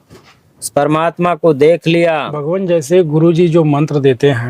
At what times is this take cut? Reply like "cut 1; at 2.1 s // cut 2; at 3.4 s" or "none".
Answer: cut 1; at 2.4 s